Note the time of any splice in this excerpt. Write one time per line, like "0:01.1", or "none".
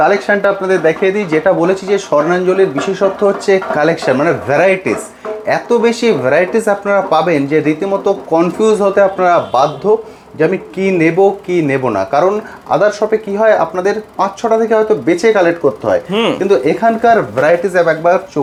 none